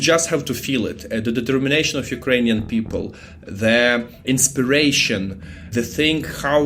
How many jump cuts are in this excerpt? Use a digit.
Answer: 2